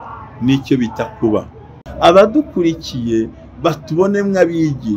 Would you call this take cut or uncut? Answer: cut